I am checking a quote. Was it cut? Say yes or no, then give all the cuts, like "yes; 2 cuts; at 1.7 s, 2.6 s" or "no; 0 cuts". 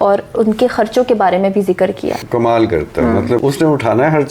yes; 2 cuts; at 2.2 s, 3.4 s